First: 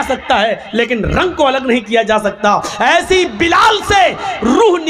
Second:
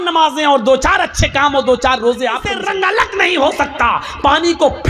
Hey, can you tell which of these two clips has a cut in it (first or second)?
second